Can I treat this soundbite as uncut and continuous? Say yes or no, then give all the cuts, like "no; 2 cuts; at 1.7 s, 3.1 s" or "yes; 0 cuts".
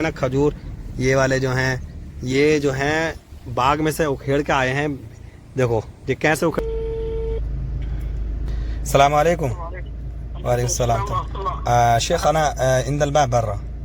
no; 1 cut; at 6.6 s